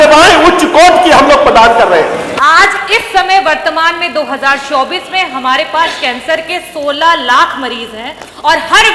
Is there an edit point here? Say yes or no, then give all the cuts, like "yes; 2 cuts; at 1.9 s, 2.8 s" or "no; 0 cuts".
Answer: yes; 1 cut; at 2.3 s